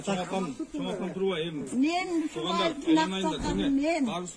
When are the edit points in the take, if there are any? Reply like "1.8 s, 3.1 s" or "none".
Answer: 2.6 s